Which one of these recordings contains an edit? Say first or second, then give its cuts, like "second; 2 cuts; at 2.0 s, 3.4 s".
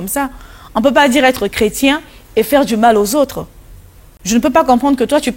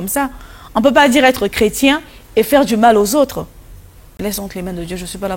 second; 1 cut; at 4.2 s